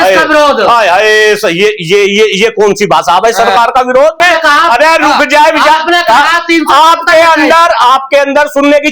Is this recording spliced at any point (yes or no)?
yes